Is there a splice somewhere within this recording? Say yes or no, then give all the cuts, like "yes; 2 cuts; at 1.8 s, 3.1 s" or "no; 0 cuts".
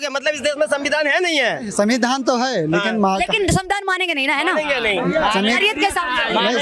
no; 0 cuts